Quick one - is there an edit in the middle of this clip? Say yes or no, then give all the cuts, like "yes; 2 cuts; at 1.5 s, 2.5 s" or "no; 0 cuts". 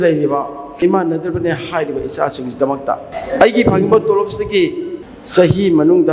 yes; 2 cuts; at 0.8 s, 3.1 s